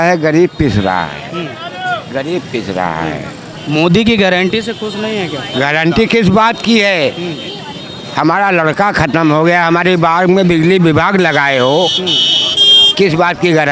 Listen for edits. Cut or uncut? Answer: uncut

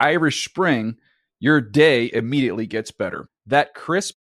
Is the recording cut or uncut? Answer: uncut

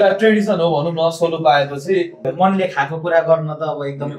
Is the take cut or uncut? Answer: cut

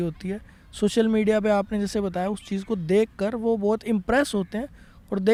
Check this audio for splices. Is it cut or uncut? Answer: uncut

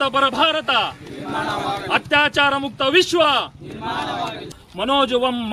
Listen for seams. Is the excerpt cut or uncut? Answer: cut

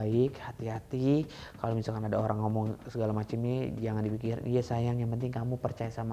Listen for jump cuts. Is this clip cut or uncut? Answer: uncut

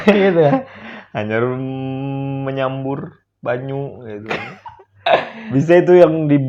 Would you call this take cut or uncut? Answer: cut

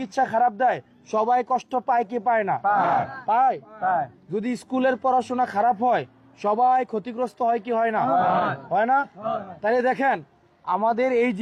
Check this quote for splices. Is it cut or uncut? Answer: uncut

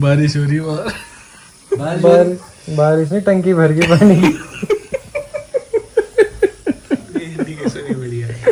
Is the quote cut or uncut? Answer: uncut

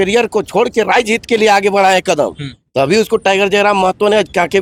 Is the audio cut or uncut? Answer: uncut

